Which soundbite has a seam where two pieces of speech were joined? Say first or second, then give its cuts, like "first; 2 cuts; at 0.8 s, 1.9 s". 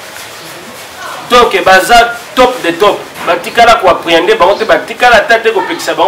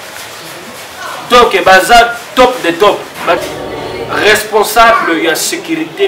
second; 1 cut; at 3.5 s